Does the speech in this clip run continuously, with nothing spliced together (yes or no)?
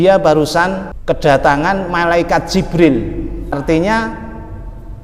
no